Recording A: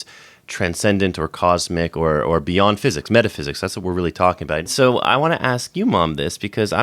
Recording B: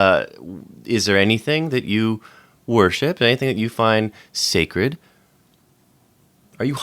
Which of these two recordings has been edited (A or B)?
A